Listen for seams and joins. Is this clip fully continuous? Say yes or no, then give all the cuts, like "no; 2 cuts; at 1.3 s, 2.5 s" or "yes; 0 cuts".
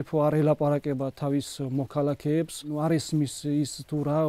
no; 1 cut; at 2.7 s